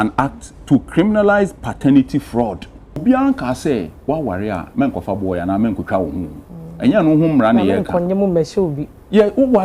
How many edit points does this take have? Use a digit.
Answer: 1